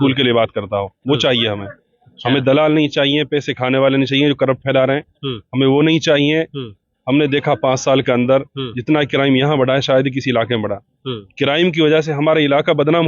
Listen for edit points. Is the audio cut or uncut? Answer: uncut